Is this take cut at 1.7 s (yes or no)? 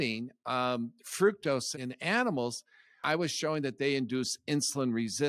yes